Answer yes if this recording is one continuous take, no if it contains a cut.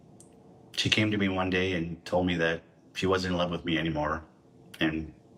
yes